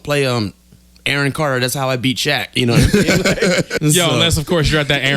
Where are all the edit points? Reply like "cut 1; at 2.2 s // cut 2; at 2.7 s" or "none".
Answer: cut 1; at 3.7 s